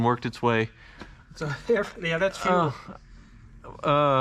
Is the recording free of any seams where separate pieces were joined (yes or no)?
yes